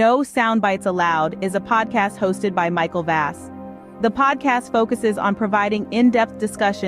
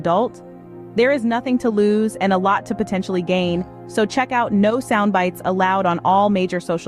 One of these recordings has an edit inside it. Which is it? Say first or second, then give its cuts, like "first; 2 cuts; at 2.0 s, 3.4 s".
first; 1 cut; at 0.9 s